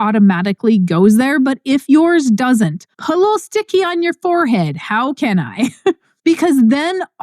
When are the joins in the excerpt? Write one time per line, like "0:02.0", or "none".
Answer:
0:02.9
0:06.1